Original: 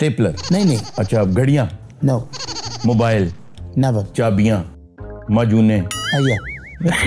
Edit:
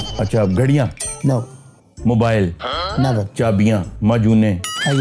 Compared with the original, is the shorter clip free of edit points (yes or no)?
no